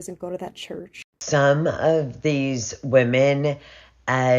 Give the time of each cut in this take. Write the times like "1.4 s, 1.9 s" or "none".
1.2 s